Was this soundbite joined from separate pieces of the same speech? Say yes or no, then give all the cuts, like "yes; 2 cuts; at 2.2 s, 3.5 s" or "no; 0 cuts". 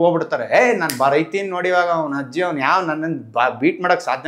no; 0 cuts